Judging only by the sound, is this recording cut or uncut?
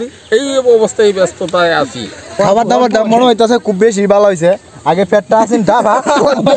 cut